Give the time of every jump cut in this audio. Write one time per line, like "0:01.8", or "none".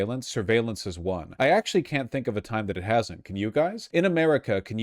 0:01.3
0:03.8